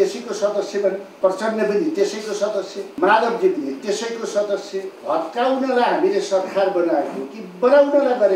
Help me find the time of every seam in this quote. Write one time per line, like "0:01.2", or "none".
0:01.1
0:02.8
0:04.9

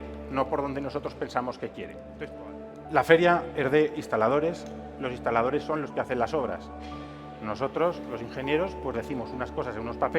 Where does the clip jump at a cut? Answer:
0:02.0

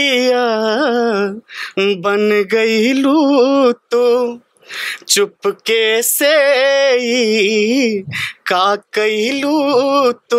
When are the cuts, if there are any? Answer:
none

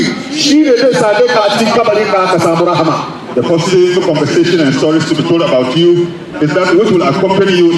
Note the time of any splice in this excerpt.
none

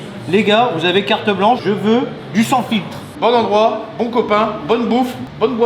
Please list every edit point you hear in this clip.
0:03.0

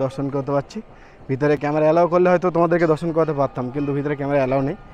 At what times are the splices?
none

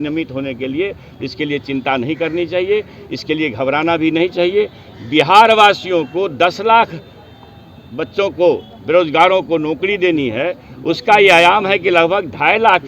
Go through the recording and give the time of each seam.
none

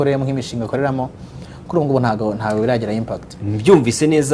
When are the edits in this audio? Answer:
none

